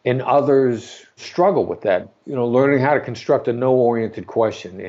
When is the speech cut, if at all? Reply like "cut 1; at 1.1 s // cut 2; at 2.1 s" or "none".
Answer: cut 1; at 1.2 s // cut 2; at 2.1 s

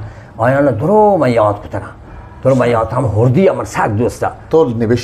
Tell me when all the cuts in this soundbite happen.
none

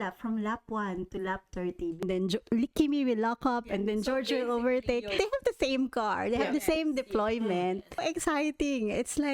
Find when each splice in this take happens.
cut 1; at 2.0 s // cut 2; at 5.1 s // cut 3; at 8.0 s

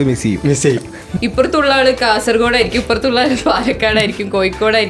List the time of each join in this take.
cut 1; at 1.1 s

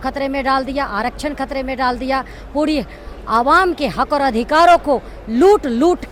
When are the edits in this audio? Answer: none

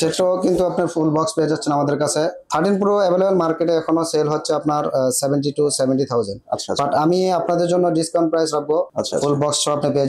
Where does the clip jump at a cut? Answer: cut 1; at 2.5 s // cut 2; at 8.9 s

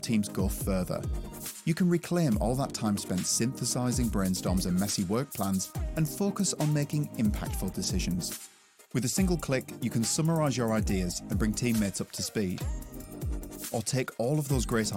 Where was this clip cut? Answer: cut 1; at 13.0 s

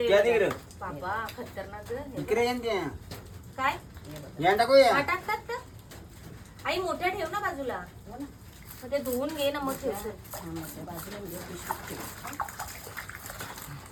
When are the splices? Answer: none

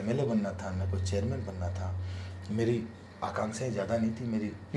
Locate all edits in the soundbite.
none

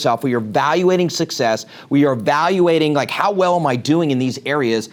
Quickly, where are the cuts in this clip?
none

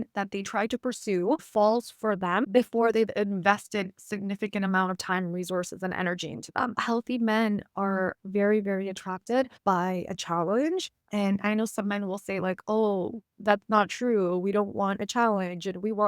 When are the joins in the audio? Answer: cut 1; at 6.7 s // cut 2; at 9.5 s // cut 3; at 11.0 s

